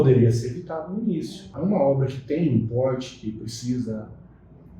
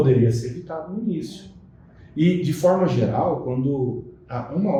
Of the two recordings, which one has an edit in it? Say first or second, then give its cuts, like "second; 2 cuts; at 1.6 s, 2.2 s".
first; 1 cut; at 1.4 s